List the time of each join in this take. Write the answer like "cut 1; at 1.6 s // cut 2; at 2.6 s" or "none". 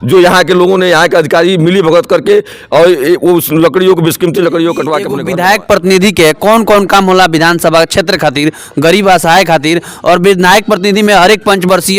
cut 1; at 5.1 s